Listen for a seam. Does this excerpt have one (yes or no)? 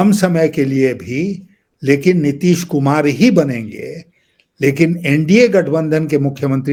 no